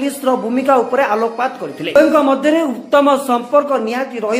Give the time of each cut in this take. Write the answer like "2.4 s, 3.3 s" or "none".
1.8 s